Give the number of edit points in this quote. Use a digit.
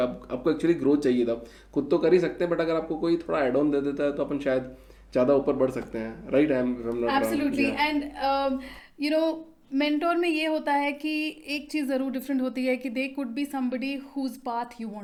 0